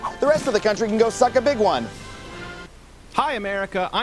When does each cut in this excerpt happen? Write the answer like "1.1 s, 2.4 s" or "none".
2.6 s